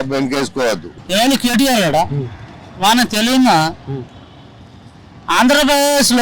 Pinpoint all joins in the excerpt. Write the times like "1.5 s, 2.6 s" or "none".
0.9 s